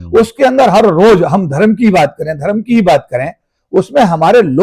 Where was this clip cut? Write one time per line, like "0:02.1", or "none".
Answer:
0:03.5